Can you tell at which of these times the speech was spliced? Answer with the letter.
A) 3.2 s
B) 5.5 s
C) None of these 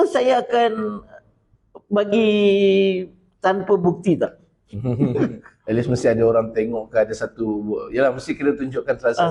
B